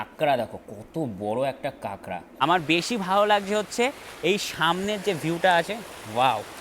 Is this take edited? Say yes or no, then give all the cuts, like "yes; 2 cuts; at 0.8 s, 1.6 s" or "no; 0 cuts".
yes; 1 cut; at 2.2 s